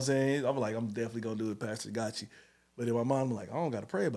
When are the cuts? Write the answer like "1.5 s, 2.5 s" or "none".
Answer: none